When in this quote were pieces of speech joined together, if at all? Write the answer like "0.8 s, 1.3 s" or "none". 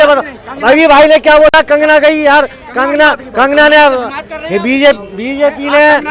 none